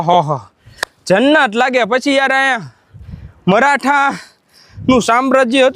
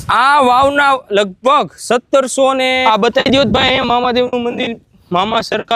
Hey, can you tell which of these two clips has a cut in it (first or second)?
second